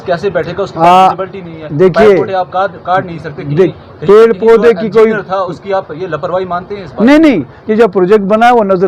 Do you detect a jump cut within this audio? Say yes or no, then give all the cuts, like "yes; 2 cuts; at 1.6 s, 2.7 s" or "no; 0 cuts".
no; 0 cuts